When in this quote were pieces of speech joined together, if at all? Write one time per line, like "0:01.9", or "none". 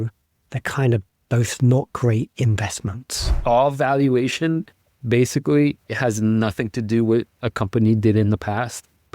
0:03.4